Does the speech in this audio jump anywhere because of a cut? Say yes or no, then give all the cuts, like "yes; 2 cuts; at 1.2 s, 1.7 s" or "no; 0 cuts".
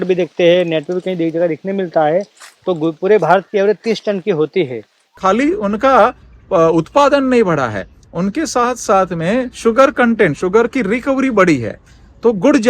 yes; 1 cut; at 5.1 s